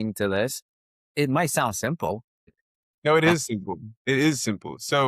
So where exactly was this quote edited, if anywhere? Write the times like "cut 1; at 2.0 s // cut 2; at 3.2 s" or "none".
cut 1; at 0.8 s // cut 2; at 2.5 s